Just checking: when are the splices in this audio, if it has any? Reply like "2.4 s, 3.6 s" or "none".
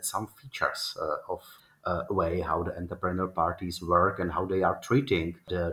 1.5 s